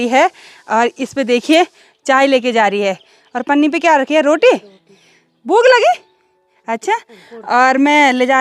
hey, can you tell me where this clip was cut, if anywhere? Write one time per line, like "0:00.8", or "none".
none